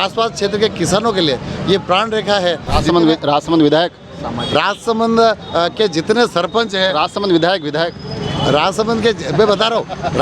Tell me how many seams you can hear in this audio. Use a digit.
1